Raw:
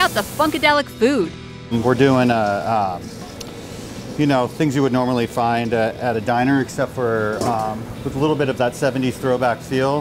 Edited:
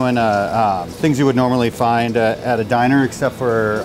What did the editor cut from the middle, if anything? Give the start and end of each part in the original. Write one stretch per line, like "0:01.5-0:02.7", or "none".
0:03.1-0:04.5